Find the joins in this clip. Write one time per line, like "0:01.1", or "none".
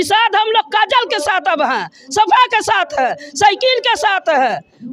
none